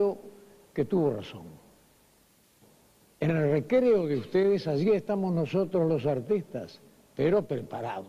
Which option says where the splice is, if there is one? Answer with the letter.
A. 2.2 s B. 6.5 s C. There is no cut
A